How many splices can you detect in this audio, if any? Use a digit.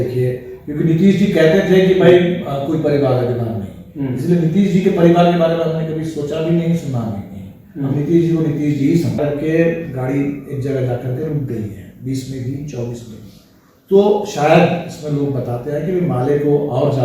1